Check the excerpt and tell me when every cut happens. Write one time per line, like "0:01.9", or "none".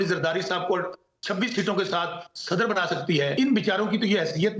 0:03.3